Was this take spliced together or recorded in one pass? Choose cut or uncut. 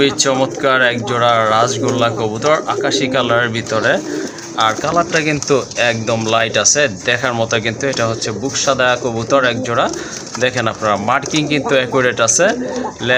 uncut